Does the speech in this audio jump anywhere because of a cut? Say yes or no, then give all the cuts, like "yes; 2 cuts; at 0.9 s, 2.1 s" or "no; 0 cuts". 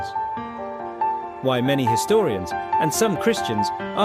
no; 0 cuts